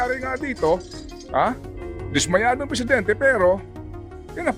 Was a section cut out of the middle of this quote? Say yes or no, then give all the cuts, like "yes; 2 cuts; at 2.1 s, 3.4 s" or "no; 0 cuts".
no; 0 cuts